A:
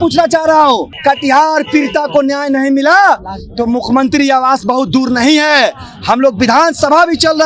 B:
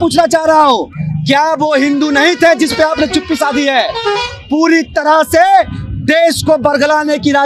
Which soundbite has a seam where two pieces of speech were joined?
A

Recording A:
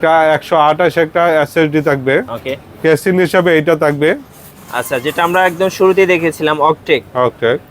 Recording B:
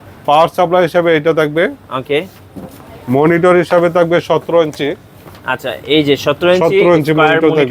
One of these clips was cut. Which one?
A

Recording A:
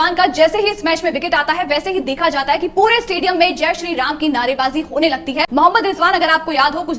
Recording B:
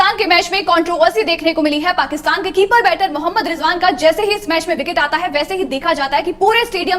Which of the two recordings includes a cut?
A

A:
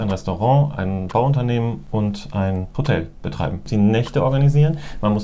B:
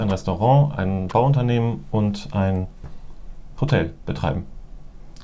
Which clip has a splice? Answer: A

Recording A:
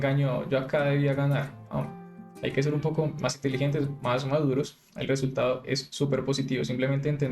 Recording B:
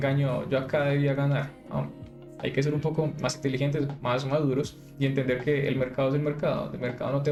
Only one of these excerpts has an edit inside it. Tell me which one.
A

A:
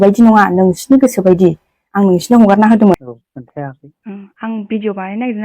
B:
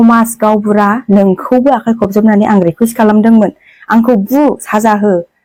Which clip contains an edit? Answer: A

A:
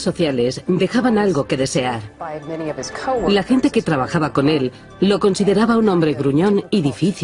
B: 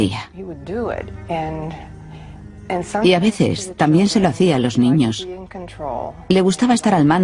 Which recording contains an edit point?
A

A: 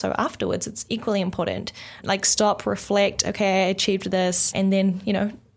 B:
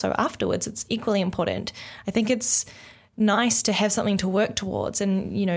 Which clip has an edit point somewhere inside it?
A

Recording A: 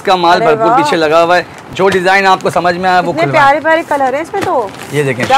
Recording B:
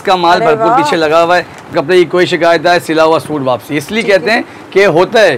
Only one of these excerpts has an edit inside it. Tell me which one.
B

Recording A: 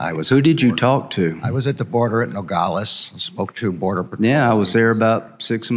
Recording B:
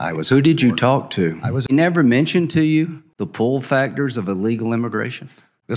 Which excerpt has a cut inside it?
B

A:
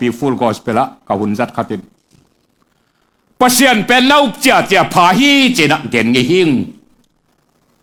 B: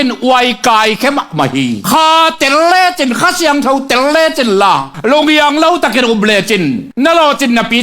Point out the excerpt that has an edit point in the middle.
B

